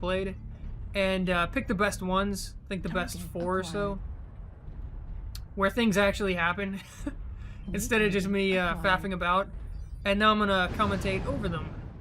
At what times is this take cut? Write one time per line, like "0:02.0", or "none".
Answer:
0:03.9